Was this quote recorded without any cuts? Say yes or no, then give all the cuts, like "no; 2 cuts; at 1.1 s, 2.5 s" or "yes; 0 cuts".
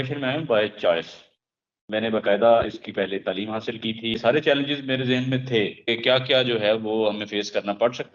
no; 2 cuts; at 4.2 s, 5.9 s